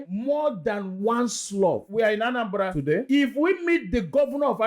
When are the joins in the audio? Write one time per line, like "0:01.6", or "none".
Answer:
0:01.9
0:03.0